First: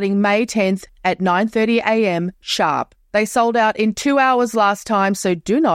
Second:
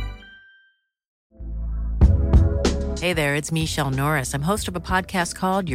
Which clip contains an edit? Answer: second; 1 cut; at 1.1 s

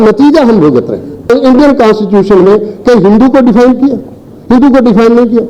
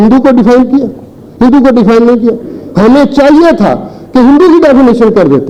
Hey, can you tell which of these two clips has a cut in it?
first; 1 cut; at 1.3 s

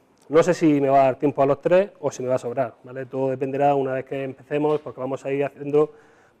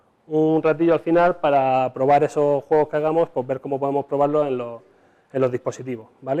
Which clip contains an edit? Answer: first; 1 cut; at 3.3 s

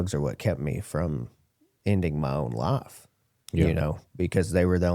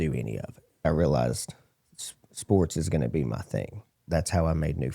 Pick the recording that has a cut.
second; 2 cuts; at 0.8 s, 4.0 s

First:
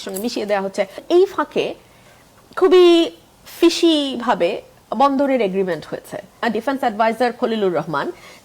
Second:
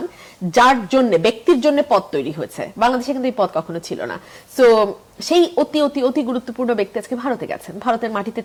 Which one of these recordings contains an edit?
first; 2 cuts; at 1.0 s, 6.4 s

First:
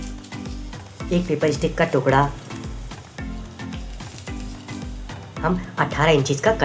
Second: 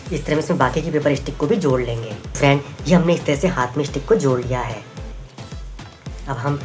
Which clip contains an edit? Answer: first; 4 cuts; at 0.9 s, 2.4 s, 3.9 s, 5.4 s

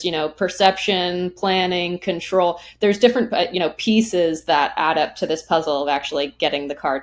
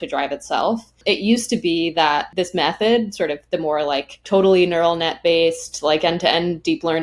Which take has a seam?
second; 3 cuts; at 1.0 s, 2.3 s, 4.2 s

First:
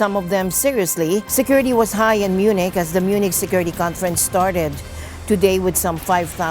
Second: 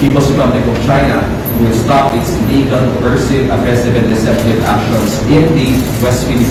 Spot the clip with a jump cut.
first; 1 cut; at 1.3 s

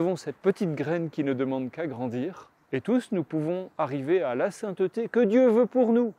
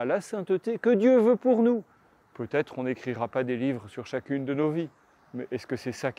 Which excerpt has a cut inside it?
first; 1 cut; at 2.5 s

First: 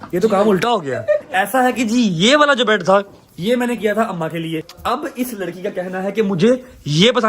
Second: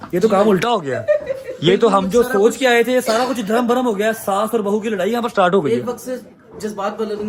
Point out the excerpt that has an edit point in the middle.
first; 2 cuts; at 1.3 s, 4.7 s

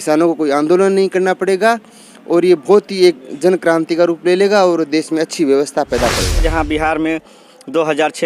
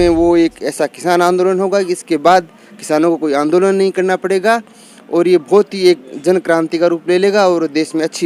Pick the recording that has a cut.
first; 1 cut; at 6.5 s

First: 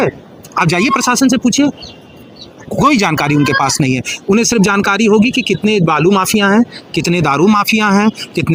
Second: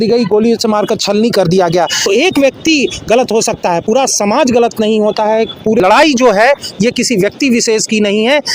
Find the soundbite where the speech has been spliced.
second; 2 cuts; at 2.1 s, 5.8 s

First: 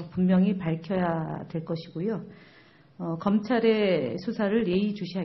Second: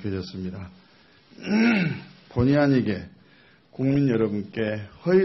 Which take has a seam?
second; 1 cut; at 2.0 s

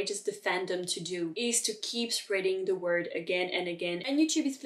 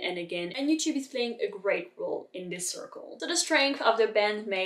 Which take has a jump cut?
first; 1 cut; at 1.3 s

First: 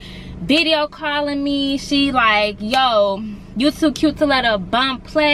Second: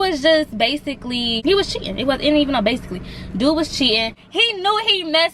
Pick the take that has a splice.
second; 2 cuts; at 1.4 s, 4.2 s

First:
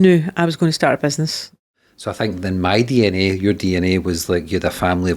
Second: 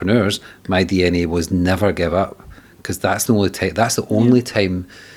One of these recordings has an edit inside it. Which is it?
first; 1 cut; at 1.7 s

